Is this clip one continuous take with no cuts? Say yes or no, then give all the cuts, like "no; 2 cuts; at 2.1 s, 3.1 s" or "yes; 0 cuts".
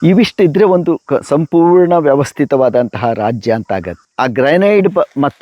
no; 1 cut; at 4.0 s